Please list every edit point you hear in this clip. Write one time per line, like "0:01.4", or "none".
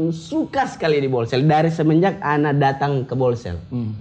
none